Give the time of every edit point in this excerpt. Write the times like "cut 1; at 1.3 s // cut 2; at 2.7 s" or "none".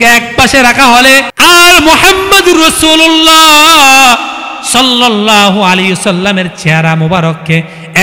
cut 1; at 1.3 s